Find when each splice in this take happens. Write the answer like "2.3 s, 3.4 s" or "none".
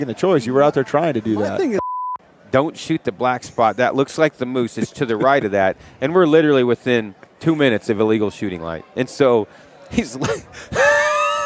1.8 s